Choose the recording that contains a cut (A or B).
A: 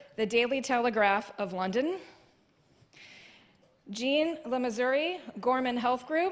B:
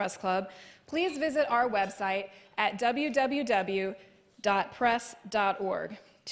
A